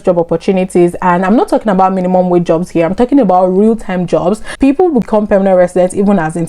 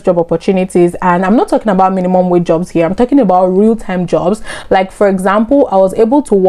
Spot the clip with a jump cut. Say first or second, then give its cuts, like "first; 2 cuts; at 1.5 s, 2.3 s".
first; 1 cut; at 4.5 s